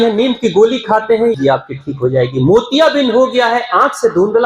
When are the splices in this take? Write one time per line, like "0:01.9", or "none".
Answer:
0:01.3